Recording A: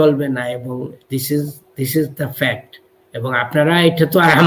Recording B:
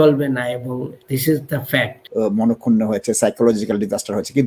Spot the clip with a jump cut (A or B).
B